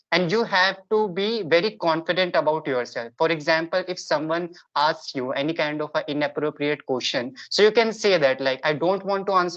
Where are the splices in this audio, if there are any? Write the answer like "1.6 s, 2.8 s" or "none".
none